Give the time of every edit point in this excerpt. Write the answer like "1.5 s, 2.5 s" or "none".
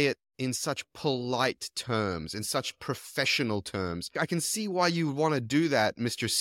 4.0 s